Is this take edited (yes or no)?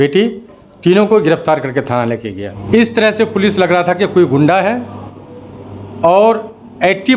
yes